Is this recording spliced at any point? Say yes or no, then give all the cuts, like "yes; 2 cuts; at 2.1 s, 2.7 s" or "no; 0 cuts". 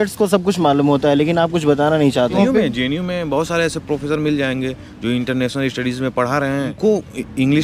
yes; 2 cuts; at 2.4 s, 6.7 s